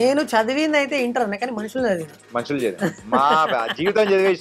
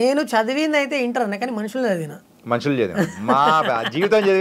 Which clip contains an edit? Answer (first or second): first